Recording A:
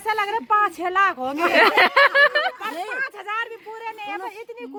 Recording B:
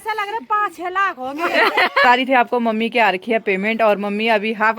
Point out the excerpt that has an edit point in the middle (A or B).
B